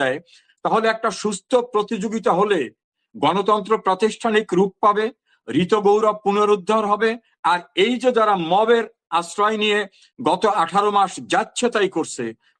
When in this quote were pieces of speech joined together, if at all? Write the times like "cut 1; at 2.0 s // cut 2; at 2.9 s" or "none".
none

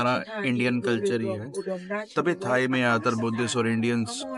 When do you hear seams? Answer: none

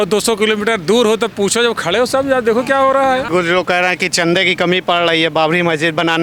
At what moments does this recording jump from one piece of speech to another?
cut 1; at 3.2 s

